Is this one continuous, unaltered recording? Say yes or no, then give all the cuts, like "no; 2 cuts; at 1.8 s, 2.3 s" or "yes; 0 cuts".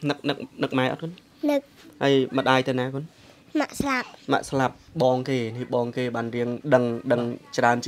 yes; 0 cuts